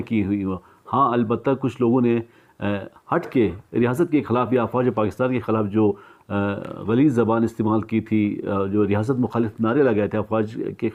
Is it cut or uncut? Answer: uncut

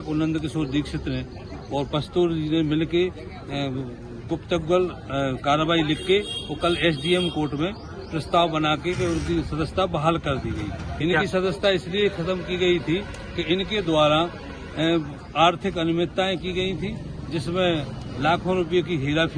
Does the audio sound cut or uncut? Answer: cut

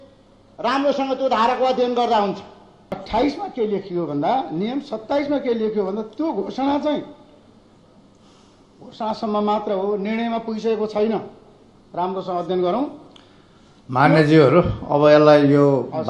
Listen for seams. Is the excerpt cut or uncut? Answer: cut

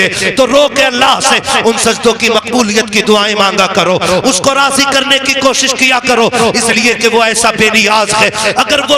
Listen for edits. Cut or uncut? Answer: uncut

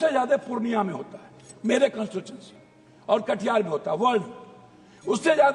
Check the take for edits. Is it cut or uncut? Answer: uncut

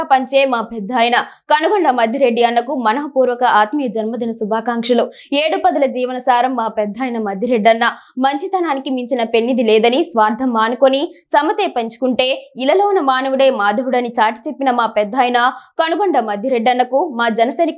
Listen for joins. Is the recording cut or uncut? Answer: uncut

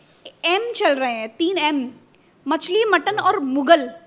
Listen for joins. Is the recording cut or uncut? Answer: uncut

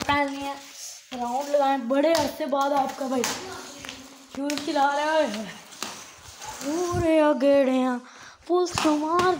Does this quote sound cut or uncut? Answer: uncut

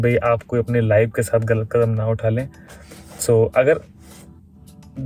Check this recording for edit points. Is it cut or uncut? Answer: uncut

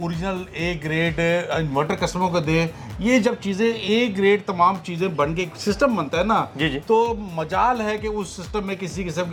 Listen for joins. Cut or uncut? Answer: uncut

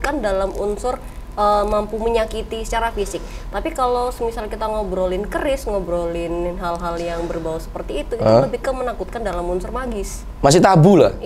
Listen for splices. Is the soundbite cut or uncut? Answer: uncut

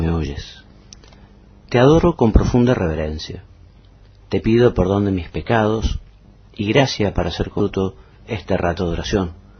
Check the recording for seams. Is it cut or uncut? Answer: uncut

